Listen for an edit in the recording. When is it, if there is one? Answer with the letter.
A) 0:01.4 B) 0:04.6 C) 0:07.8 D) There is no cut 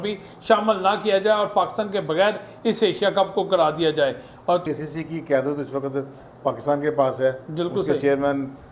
B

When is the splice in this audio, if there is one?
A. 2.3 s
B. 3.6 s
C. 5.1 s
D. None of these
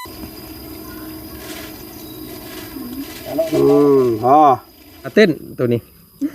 C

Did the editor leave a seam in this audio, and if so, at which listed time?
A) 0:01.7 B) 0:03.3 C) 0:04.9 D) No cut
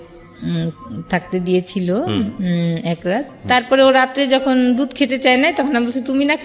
B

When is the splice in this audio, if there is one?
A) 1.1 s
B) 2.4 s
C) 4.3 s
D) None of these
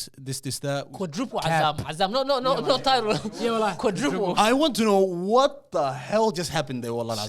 C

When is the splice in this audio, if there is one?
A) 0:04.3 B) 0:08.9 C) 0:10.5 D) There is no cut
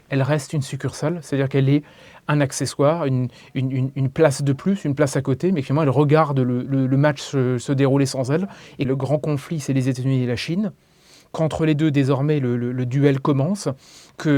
B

